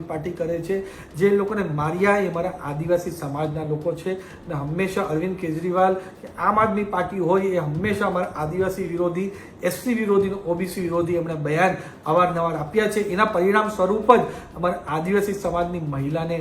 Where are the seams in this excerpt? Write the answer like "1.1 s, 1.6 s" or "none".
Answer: none